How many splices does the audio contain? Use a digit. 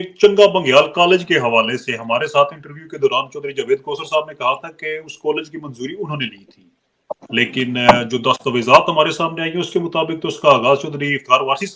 0